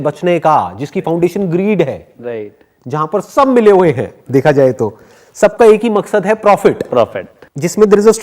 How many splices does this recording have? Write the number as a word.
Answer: one